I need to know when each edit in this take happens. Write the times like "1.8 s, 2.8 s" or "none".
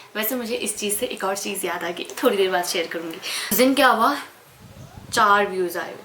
3.5 s